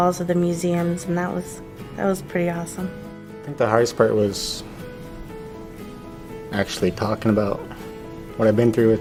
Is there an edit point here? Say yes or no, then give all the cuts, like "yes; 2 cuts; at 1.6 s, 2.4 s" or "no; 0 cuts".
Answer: no; 0 cuts